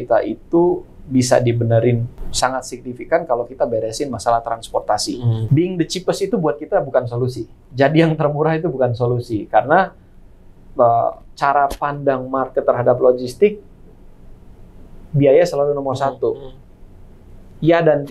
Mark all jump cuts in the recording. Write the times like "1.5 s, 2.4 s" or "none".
2.2 s, 5.4 s